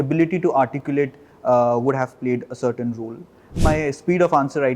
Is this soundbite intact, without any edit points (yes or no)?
no